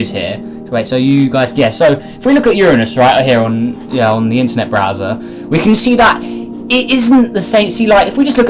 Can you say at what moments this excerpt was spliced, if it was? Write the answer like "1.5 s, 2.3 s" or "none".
3.1 s